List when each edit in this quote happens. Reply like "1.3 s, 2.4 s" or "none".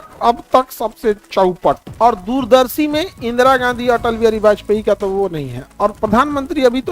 1.9 s